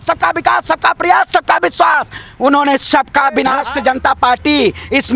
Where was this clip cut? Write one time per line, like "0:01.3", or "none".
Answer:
0:03.6